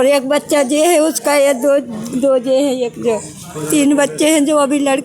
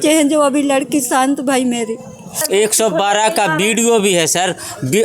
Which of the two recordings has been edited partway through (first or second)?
second